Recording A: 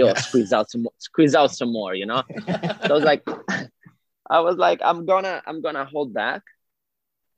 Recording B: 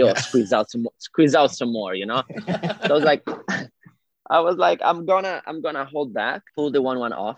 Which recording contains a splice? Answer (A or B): B